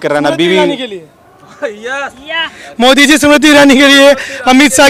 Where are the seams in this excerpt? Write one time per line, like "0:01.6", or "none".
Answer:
none